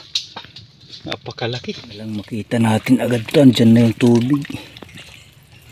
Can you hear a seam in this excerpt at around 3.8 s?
no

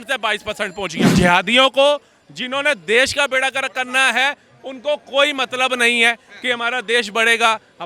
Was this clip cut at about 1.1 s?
yes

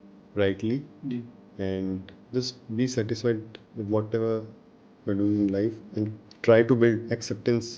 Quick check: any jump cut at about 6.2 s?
yes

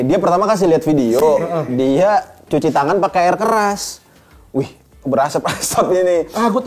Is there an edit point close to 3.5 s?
no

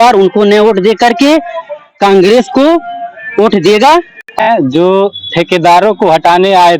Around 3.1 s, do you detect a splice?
no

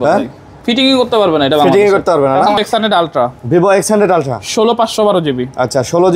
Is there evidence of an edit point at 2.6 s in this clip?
yes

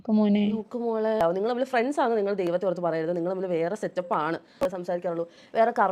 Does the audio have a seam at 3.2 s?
no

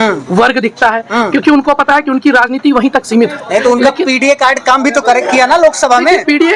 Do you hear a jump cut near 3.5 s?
no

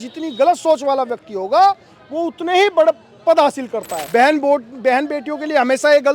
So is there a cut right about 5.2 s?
no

